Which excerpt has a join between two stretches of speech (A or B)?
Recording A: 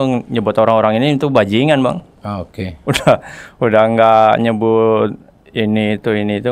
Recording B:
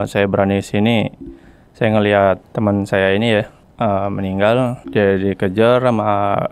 B